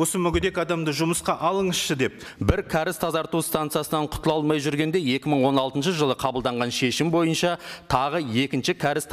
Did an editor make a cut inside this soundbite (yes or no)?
yes